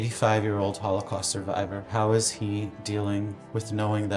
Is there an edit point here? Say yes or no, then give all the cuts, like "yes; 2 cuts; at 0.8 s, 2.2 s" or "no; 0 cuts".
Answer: yes; 1 cut; at 1.9 s